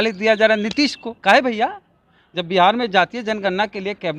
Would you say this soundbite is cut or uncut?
cut